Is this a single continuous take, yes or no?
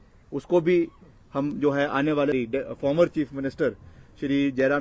no